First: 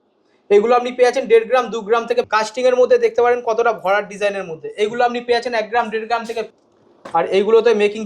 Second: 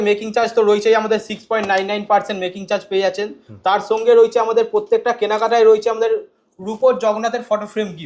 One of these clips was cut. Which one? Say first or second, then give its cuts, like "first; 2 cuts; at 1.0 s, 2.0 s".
first; 2 cuts; at 2.3 s, 6.5 s